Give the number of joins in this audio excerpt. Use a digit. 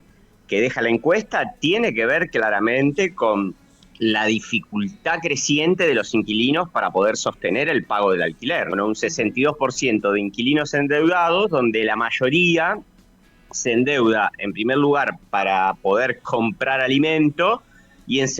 1